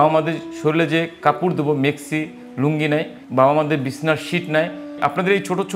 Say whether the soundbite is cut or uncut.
cut